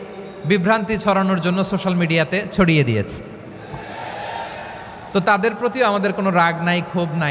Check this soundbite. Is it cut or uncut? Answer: uncut